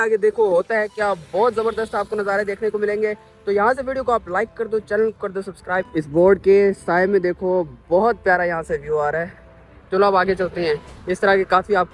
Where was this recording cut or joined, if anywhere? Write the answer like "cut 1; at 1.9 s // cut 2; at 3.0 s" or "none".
cut 1; at 5.9 s

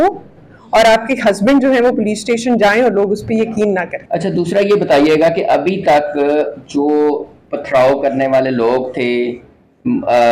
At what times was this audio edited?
cut 1; at 4.0 s

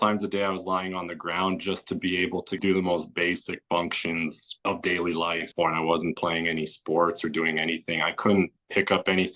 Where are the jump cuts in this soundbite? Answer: cut 1; at 2.6 s // cut 2; at 5.5 s

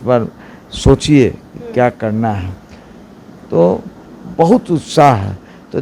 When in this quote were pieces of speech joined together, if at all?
none

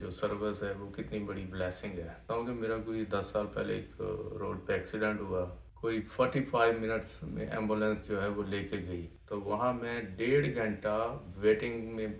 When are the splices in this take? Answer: cut 1; at 2.2 s // cut 2; at 5.6 s // cut 3; at 9.1 s

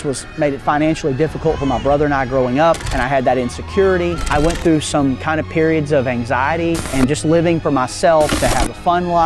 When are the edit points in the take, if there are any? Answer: cut 1; at 2.9 s // cut 2; at 4.2 s // cut 3; at 6.9 s // cut 4; at 8.3 s

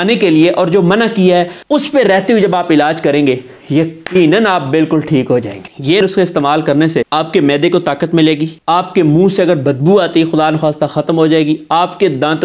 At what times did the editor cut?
cut 1; at 1.6 s // cut 2; at 6.0 s // cut 3; at 7.1 s // cut 4; at 8.5 s

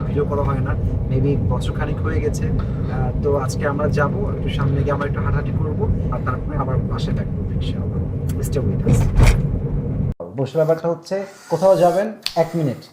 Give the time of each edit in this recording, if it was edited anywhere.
cut 1; at 10.3 s

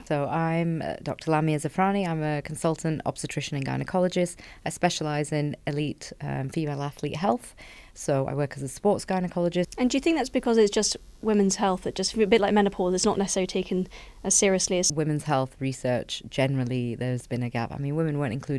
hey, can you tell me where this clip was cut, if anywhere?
cut 1; at 9.7 s // cut 2; at 14.9 s

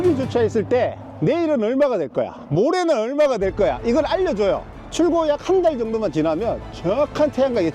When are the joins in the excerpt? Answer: cut 1; at 4.8 s

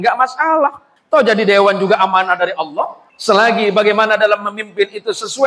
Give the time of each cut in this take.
cut 1; at 0.9 s // cut 2; at 3.0 s

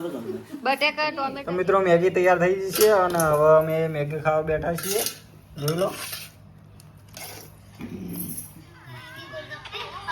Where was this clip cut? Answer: cut 1; at 1.2 s // cut 2; at 9.0 s

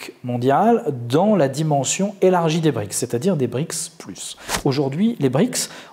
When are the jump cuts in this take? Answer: cut 1; at 4.5 s

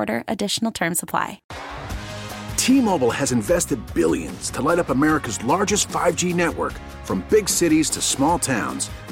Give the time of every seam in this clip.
cut 1; at 1.5 s

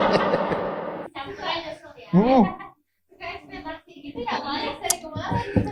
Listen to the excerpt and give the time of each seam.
none

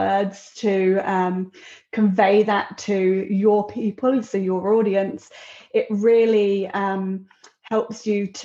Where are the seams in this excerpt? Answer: none

